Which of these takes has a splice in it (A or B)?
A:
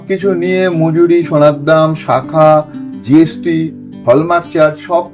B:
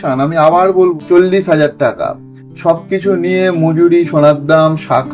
B